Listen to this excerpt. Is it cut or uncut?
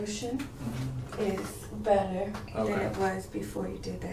uncut